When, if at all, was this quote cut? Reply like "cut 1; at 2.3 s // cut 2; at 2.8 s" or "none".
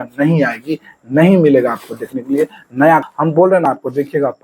cut 1; at 3.1 s